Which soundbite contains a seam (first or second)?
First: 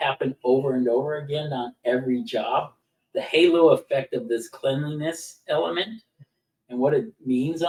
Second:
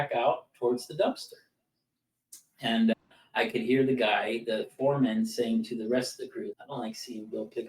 second